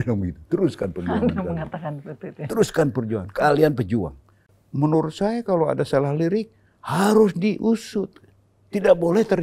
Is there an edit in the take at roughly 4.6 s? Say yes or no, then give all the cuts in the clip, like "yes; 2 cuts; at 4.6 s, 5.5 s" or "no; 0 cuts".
yes; 1 cut; at 4.6 s